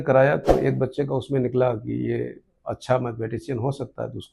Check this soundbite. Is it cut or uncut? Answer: uncut